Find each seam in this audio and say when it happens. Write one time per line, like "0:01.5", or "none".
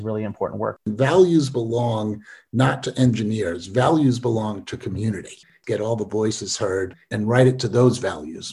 0:00.8
0:05.6
0:07.1